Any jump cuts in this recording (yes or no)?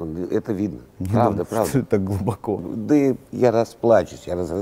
yes